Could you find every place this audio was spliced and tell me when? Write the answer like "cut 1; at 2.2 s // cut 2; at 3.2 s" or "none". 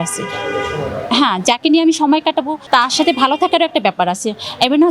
cut 1; at 2.6 s